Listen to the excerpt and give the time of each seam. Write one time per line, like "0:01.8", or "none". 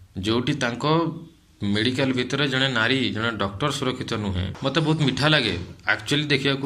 0:04.5